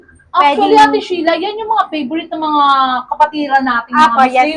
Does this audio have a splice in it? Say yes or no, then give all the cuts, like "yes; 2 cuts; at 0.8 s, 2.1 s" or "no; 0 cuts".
no; 0 cuts